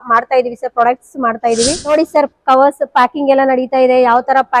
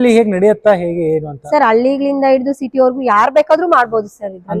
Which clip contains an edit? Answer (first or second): first